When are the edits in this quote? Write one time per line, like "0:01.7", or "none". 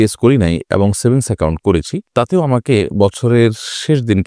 none

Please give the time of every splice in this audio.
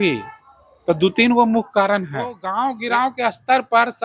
0:02.4

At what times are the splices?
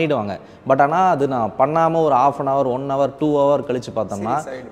none

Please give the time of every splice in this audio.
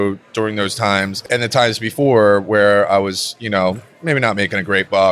0:01.1

